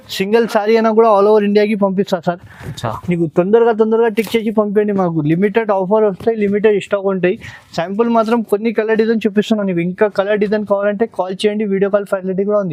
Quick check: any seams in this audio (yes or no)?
no